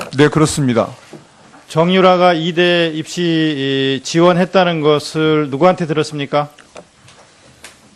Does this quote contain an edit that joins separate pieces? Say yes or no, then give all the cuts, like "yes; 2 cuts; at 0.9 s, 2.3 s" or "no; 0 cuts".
no; 0 cuts